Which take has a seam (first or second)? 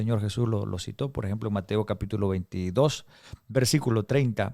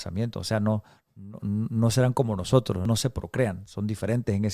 second